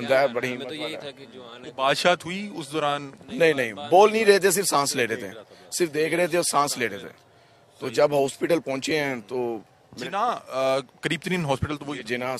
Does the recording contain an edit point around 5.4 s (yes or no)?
no